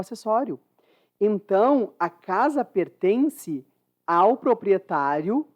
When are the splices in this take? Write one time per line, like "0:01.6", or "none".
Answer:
none